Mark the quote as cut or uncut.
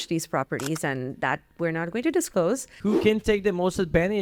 cut